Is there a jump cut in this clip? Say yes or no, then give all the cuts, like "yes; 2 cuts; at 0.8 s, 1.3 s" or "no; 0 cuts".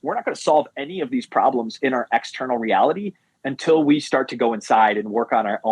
no; 0 cuts